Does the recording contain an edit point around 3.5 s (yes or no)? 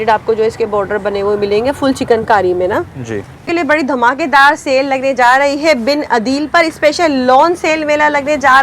yes